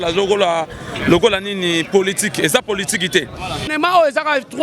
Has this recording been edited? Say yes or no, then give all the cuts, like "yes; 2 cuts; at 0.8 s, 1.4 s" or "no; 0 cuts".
yes; 1 cut; at 3.7 s